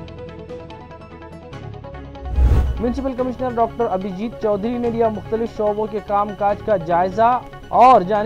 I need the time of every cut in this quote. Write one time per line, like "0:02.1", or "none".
0:02.6